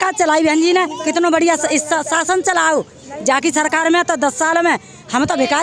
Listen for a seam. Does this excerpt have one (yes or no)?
no